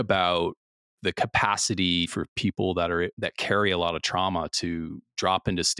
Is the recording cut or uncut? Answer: uncut